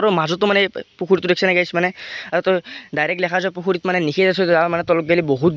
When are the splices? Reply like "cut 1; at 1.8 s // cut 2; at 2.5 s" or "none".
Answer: none